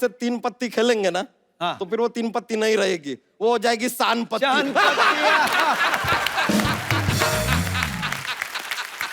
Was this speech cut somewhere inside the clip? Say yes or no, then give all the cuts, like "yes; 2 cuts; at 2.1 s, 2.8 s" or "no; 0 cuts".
no; 0 cuts